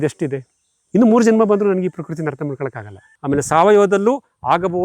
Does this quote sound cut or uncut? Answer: cut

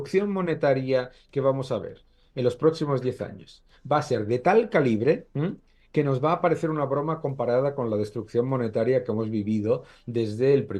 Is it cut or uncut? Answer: uncut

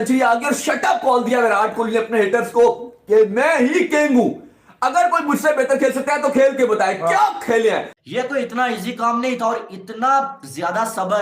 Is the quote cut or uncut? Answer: cut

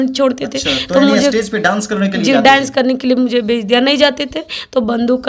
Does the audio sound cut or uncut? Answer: uncut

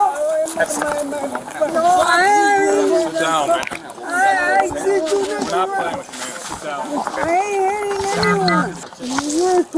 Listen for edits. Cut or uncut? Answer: uncut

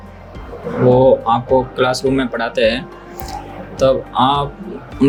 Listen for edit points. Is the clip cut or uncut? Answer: uncut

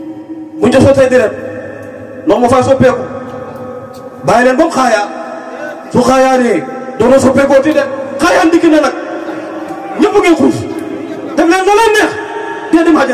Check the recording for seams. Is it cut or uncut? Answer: uncut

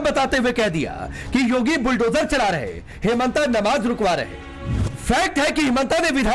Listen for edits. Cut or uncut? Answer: cut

